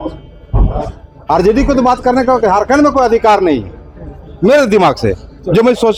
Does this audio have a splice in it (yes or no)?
no